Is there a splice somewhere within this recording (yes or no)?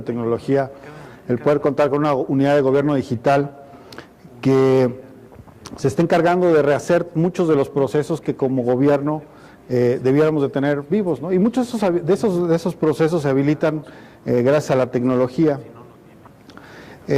no